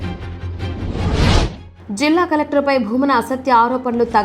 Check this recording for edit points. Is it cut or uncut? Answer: cut